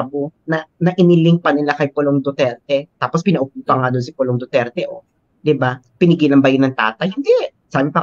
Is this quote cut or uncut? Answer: uncut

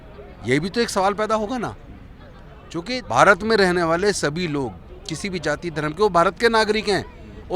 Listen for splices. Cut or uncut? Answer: cut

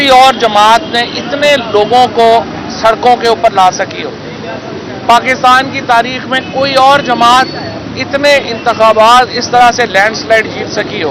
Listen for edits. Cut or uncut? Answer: uncut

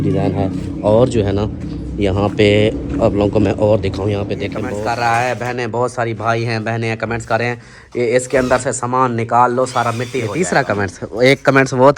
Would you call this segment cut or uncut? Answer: cut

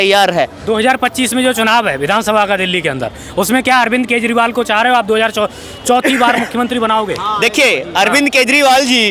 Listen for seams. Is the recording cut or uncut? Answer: uncut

